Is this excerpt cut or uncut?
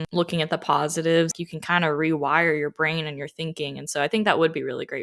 cut